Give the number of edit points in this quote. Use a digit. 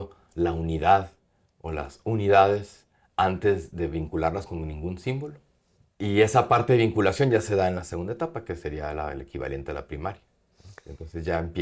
0